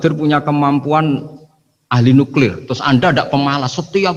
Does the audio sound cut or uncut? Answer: uncut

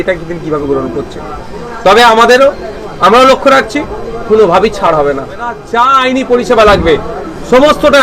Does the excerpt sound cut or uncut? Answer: cut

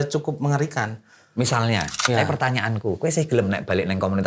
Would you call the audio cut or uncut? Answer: cut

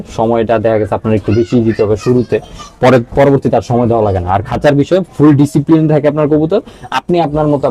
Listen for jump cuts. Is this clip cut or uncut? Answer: uncut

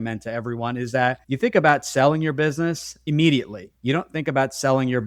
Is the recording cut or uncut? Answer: uncut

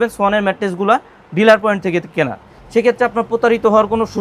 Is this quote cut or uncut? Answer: uncut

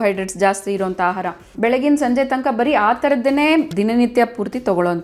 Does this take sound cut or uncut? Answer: cut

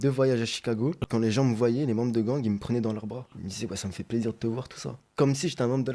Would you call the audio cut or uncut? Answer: cut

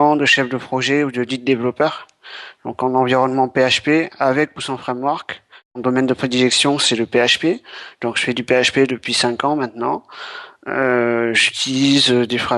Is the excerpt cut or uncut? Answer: cut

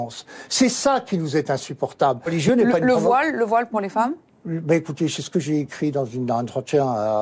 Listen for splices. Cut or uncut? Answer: cut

